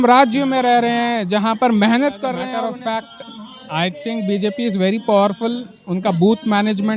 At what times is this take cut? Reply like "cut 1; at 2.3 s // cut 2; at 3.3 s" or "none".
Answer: cut 1; at 2.5 s